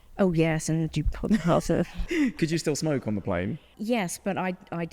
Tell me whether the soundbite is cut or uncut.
cut